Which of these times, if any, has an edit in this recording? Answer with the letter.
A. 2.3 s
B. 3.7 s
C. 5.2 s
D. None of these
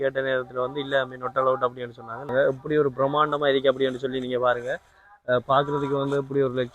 A